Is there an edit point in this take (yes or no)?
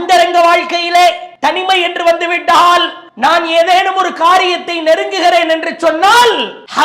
yes